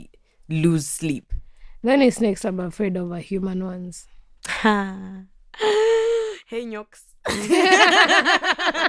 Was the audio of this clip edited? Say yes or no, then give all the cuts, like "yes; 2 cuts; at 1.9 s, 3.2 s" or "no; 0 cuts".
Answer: no; 0 cuts